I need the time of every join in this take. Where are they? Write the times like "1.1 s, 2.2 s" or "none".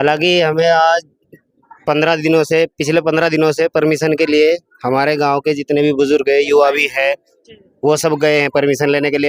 none